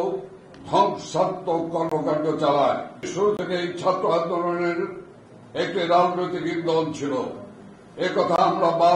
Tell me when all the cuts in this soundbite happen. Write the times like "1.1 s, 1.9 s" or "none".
3.0 s